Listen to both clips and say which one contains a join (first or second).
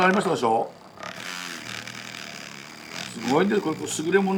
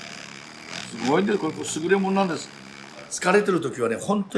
second